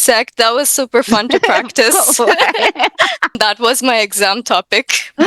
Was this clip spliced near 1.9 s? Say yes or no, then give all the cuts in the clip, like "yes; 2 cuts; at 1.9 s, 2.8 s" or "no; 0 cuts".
no; 1 cut; at 3.3 s